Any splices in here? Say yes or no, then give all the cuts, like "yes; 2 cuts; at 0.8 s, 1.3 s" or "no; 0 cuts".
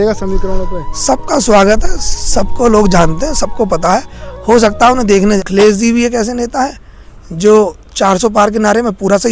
yes; 1 cut; at 5.4 s